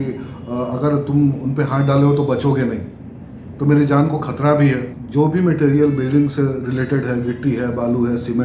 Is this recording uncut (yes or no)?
no